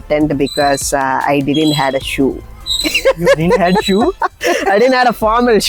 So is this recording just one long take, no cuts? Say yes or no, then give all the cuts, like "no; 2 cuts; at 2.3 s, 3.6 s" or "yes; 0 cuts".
yes; 0 cuts